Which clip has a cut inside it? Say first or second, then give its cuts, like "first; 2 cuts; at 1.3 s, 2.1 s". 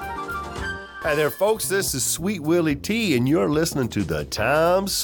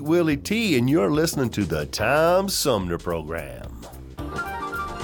first; 1 cut; at 0.9 s